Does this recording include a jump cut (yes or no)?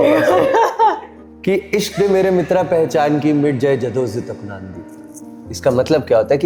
no